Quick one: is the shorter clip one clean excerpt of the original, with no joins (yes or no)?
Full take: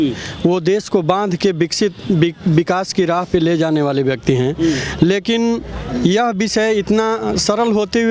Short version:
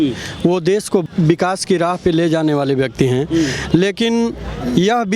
no